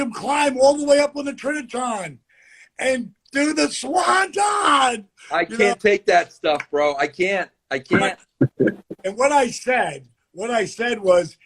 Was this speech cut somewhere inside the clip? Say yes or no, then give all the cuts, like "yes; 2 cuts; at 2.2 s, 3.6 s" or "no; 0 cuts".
no; 0 cuts